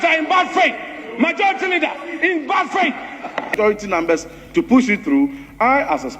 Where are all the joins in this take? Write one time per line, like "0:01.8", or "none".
0:03.5